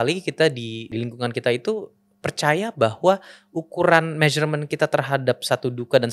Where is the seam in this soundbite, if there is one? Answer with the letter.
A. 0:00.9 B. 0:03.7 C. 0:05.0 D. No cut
A